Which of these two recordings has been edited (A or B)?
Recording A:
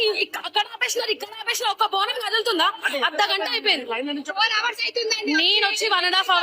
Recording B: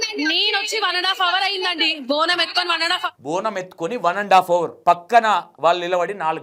B